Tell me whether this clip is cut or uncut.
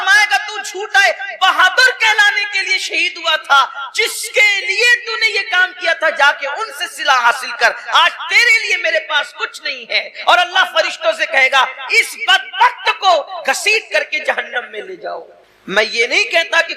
uncut